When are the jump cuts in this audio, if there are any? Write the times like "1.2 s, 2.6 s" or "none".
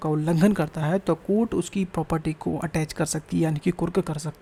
none